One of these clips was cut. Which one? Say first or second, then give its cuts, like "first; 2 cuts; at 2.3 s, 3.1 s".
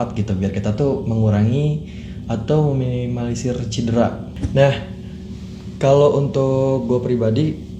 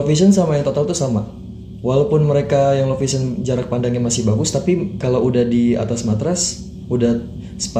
first; 1 cut; at 4.3 s